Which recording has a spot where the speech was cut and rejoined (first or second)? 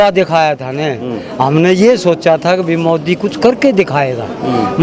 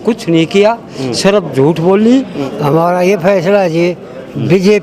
second